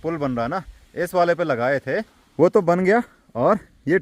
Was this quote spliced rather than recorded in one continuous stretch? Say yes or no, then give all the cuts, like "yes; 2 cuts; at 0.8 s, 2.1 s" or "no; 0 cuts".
no; 0 cuts